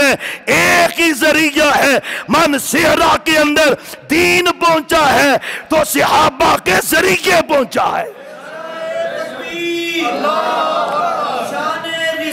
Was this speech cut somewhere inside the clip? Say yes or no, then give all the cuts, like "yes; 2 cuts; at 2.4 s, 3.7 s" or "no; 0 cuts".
no; 0 cuts